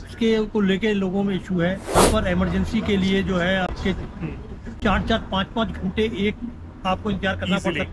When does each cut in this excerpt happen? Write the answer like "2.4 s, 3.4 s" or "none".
2.0 s

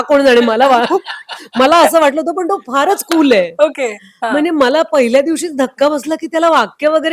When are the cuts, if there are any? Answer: none

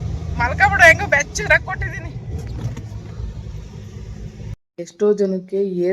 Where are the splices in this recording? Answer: 4.4 s

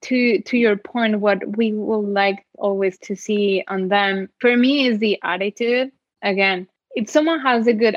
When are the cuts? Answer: 4.3 s, 6.8 s

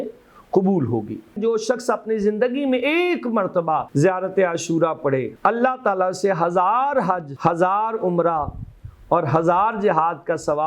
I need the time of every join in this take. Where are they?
1.4 s, 3.9 s, 5.3 s, 7.3 s

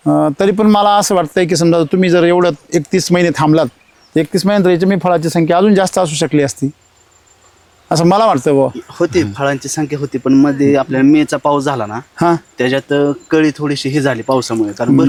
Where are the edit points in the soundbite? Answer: none

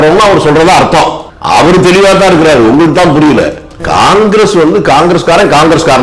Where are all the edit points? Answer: 1.3 s, 3.7 s

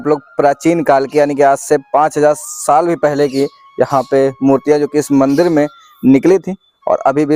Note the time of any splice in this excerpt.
none

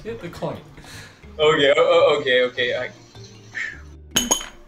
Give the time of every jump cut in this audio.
none

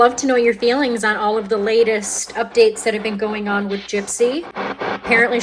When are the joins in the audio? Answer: 4.5 s

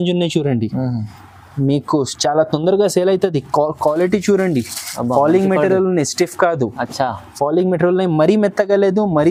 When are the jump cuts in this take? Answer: none

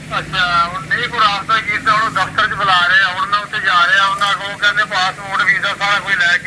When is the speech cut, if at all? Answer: none

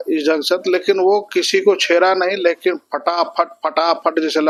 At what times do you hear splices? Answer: none

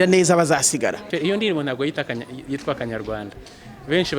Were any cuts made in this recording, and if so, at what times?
1.1 s

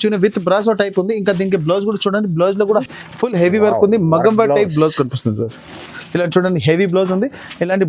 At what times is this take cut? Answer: 2.9 s

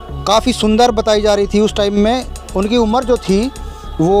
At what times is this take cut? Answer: none

